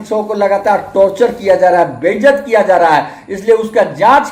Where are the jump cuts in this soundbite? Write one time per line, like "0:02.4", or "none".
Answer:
none